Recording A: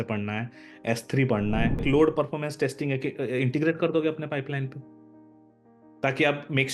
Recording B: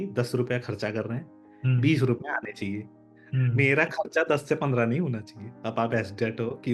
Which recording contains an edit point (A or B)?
A